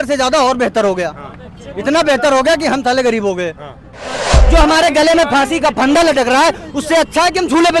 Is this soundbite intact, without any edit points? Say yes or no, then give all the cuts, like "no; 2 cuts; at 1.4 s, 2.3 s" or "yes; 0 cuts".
no; 1 cut; at 4.3 s